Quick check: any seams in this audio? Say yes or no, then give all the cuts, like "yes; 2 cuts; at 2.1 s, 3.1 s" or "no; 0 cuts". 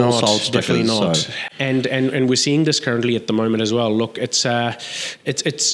no; 0 cuts